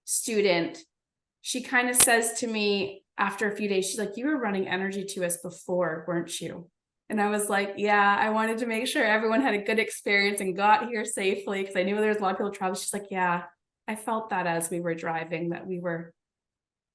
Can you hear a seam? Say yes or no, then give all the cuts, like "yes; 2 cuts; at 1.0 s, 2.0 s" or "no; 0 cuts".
no; 0 cuts